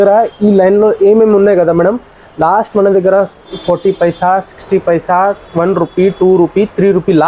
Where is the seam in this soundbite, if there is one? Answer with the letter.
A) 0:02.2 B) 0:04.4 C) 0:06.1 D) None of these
D